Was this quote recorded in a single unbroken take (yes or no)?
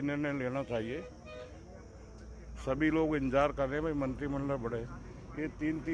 yes